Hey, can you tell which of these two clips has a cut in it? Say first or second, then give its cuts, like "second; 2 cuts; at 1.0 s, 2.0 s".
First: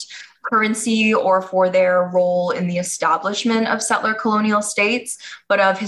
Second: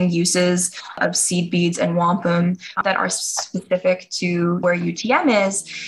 second; 2 cuts; at 2.7 s, 4.6 s